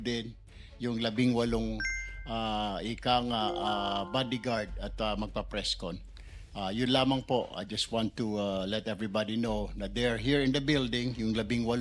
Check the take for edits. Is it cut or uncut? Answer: uncut